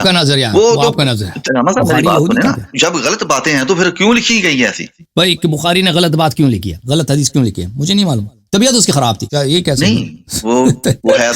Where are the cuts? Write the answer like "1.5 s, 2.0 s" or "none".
1.4 s, 2.7 s, 5.0 s, 6.8 s